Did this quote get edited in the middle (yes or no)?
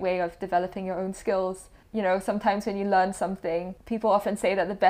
yes